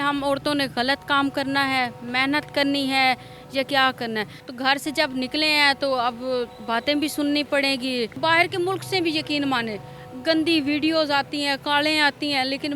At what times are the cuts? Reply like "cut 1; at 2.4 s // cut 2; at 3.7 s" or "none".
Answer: cut 1; at 4.4 s // cut 2; at 8.2 s